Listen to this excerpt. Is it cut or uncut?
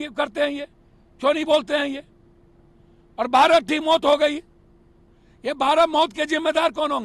uncut